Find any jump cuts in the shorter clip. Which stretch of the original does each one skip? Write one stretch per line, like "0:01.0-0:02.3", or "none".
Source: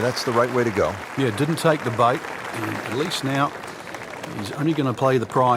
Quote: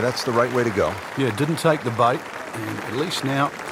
none